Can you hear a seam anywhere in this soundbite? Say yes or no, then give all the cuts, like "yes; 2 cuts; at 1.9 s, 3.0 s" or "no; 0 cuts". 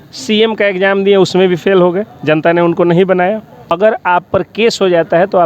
yes; 1 cut; at 3.8 s